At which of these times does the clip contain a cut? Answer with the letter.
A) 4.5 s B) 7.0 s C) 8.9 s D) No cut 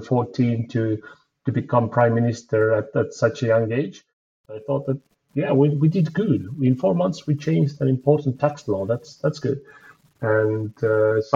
A